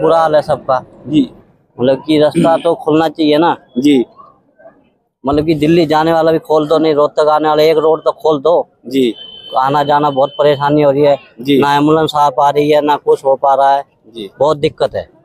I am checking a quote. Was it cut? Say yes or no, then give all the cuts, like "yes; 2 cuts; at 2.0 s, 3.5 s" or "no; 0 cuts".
no; 0 cuts